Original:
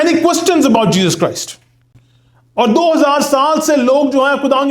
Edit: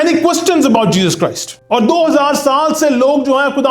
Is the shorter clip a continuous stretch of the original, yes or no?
no